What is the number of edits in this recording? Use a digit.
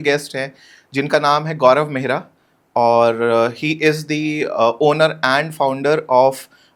0